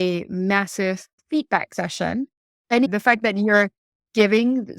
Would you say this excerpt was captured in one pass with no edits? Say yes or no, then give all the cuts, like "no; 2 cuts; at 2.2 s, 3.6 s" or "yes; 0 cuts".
no; 2 cuts; at 1.2 s, 2.9 s